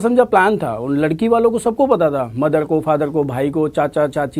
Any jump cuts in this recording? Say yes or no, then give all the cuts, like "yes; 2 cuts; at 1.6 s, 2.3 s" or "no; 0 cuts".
no; 0 cuts